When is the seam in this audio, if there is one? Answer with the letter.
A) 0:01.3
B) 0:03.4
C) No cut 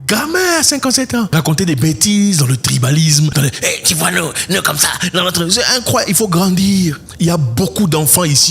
A